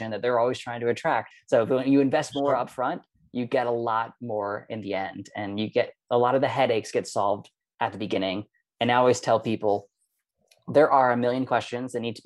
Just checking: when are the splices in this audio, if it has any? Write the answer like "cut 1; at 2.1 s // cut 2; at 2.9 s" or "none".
cut 1; at 1.3 s